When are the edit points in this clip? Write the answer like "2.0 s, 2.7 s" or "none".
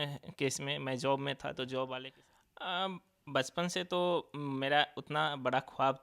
2.1 s